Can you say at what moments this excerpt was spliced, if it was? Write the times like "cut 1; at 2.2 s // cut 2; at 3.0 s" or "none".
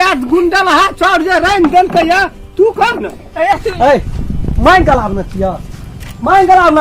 cut 1; at 3.6 s